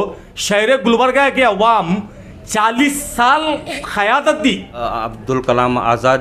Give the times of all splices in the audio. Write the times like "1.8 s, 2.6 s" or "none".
4.9 s